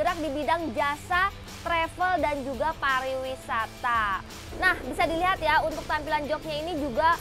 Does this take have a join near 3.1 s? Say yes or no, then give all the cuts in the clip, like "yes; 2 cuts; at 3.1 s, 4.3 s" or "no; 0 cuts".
no; 1 cut; at 4.5 s